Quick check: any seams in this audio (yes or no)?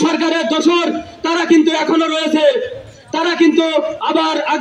no